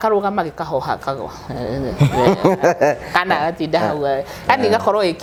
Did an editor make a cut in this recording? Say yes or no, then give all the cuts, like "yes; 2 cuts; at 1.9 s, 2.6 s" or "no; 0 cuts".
no; 0 cuts